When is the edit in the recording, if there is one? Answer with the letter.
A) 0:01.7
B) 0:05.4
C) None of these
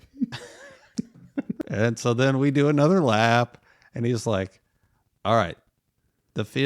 A